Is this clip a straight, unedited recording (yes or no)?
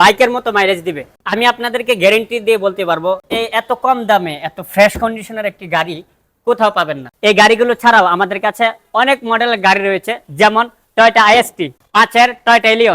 no